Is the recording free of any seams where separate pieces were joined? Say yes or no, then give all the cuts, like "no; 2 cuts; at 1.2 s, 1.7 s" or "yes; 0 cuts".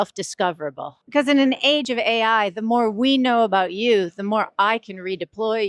no; 2 cuts; at 0.9 s, 1.8 s